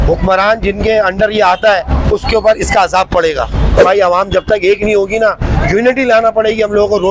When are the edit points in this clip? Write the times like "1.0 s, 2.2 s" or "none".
3.8 s